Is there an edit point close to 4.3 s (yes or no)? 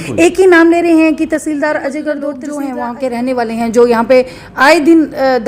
no